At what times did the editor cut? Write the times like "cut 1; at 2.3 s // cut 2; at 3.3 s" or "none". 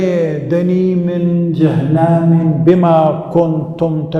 none